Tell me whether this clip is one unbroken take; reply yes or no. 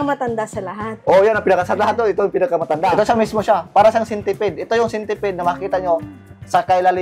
no